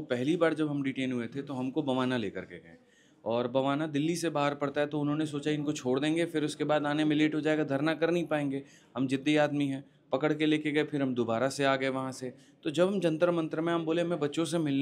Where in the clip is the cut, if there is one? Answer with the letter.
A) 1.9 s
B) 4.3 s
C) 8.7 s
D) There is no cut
D